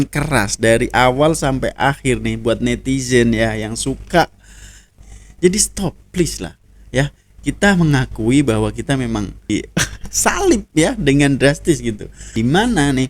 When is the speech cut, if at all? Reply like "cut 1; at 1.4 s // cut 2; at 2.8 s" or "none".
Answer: cut 1; at 4.8 s // cut 2; at 9.5 s // cut 3; at 12.2 s